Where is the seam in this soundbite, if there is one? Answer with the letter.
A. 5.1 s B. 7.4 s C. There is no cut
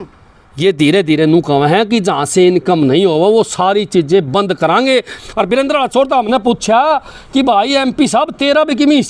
A